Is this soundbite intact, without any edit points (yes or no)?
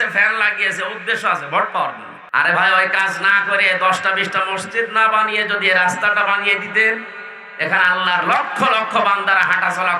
no